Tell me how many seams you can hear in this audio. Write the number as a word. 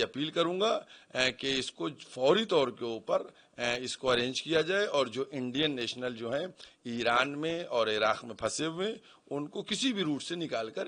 zero